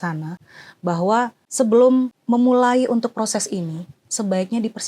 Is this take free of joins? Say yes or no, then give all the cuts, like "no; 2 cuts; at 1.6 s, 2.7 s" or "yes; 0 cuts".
no; 2 cuts; at 1.4 s, 2.2 s